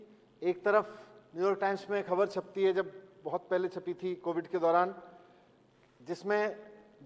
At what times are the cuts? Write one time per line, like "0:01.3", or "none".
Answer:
none